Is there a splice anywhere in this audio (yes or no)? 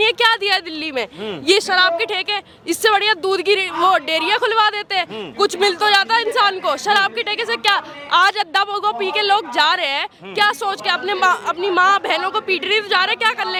no